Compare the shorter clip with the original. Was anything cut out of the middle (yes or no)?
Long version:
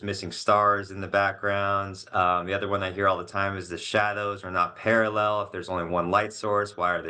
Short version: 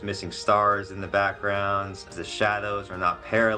yes